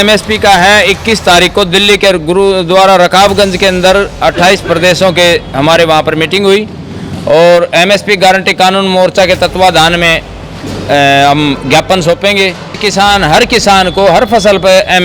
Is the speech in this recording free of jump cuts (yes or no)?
no